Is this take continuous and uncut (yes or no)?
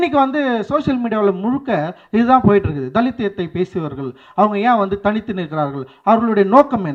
yes